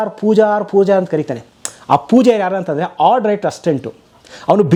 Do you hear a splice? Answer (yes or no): no